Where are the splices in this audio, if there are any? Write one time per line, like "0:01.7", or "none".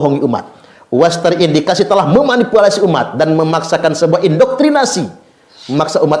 none